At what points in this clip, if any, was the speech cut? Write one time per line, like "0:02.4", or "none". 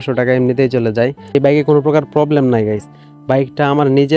0:01.4

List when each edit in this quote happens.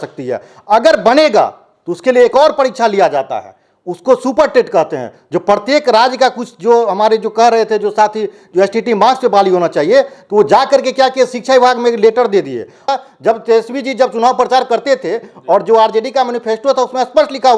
0:12.9

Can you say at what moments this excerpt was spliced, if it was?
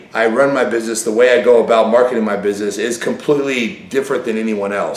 none

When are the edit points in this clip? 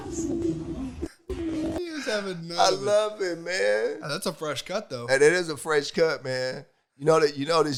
none

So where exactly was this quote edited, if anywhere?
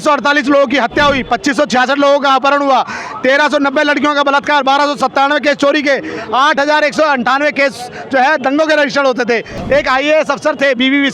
0:09.5

